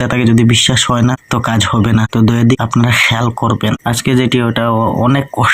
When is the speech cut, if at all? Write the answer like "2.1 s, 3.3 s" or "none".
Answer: 3.8 s